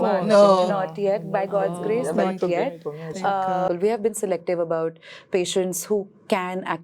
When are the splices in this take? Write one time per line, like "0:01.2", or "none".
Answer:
0:03.7